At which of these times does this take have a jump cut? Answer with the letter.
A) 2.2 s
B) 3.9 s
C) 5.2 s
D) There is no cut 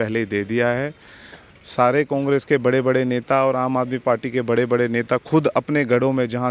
D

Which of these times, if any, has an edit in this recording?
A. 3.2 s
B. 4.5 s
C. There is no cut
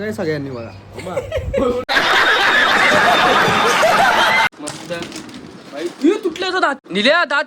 B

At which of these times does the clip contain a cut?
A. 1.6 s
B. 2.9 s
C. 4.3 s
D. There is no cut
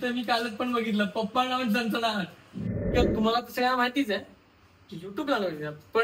B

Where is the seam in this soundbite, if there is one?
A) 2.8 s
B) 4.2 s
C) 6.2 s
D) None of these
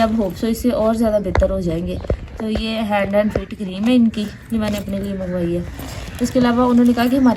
D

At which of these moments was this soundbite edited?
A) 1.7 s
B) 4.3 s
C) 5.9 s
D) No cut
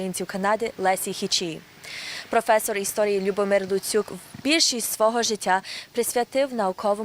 A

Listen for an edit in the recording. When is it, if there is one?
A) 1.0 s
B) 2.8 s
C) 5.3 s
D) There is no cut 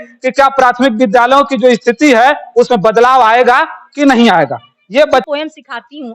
C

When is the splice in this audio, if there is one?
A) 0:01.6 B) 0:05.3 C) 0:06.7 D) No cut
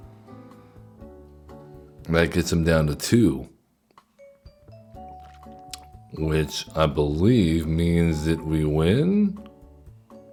D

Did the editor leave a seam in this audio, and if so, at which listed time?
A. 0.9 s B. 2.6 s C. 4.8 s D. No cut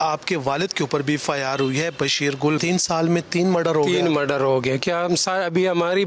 B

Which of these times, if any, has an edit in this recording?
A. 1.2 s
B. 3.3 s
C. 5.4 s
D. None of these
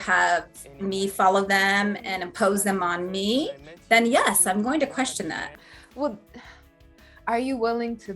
C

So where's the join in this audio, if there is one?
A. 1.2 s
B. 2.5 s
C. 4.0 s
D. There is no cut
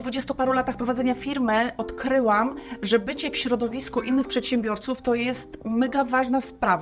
D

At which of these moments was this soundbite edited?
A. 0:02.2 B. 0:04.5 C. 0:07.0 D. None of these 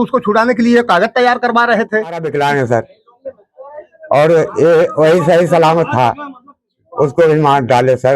A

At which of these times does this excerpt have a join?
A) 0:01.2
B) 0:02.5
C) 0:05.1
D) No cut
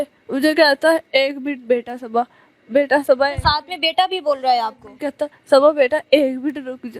C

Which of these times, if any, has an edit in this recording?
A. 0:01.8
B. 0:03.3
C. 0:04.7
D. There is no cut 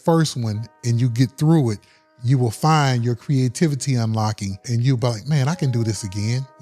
C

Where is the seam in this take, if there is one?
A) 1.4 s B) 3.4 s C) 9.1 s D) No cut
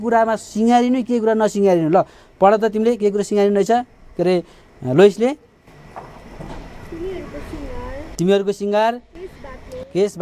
D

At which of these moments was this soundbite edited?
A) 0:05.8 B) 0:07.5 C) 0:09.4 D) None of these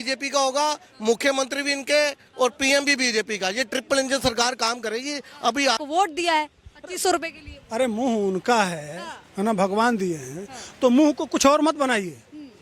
A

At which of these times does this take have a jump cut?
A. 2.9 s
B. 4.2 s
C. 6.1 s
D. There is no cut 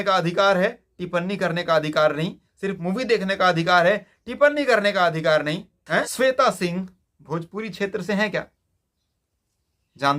C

